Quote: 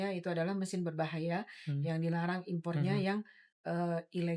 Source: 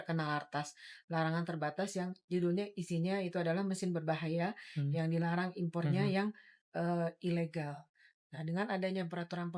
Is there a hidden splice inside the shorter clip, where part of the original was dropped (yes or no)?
no